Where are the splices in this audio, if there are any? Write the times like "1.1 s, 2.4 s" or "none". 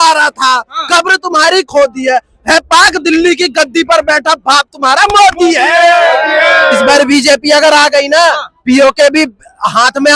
6.8 s